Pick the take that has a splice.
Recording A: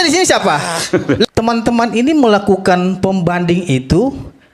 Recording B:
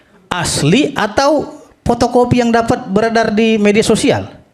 A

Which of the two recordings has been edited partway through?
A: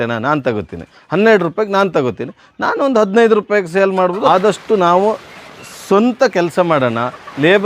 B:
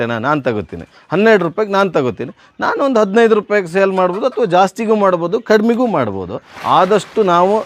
A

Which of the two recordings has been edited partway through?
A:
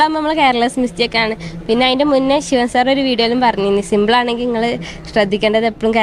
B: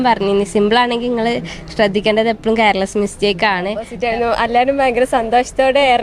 B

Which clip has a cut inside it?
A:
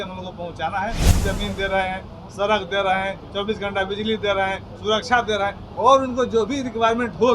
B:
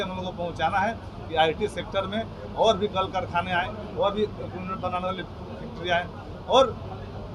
A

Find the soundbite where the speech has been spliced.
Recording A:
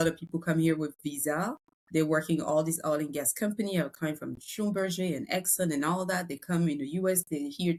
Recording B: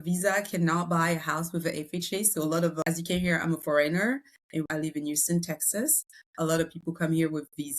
B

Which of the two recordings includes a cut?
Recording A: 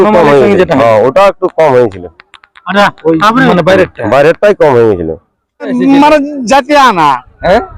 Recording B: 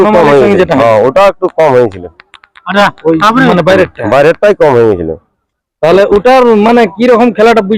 A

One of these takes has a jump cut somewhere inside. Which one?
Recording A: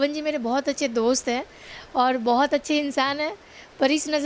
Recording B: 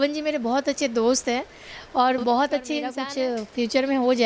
B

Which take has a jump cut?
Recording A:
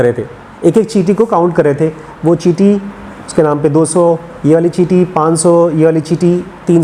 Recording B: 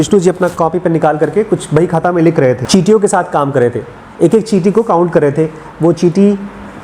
B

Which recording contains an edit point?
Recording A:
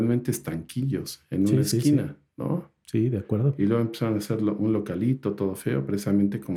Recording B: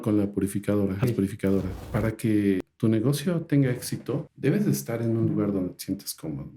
B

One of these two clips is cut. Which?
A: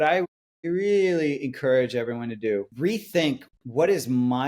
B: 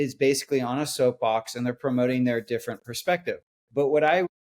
A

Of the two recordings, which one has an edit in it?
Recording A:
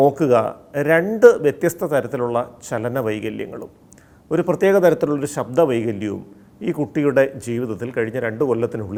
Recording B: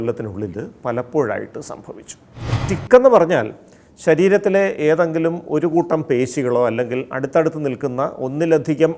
B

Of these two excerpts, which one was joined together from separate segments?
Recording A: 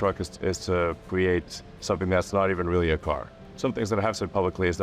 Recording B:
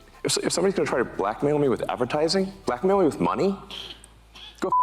A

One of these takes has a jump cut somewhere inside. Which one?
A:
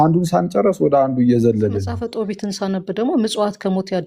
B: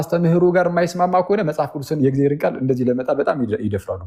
A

